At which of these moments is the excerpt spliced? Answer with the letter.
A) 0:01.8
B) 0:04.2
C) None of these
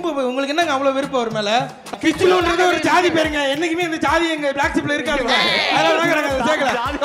A